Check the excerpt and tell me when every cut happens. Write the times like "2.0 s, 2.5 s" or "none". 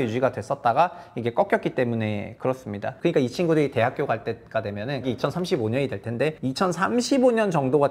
2.8 s, 5.0 s, 6.4 s

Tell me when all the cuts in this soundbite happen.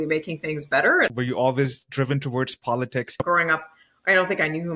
1.1 s, 3.2 s

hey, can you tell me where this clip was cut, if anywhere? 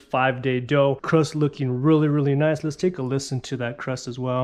1.0 s

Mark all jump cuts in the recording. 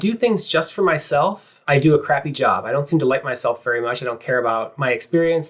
1.5 s

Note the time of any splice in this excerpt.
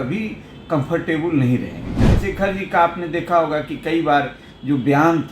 1.9 s

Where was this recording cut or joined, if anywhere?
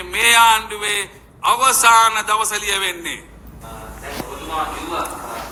none

